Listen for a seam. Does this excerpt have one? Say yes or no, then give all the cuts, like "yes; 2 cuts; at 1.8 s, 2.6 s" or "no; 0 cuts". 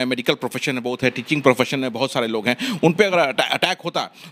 no; 0 cuts